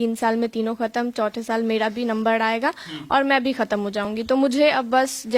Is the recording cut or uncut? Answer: uncut